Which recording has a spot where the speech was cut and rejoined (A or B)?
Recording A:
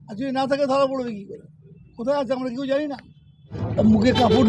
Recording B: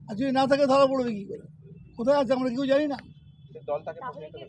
A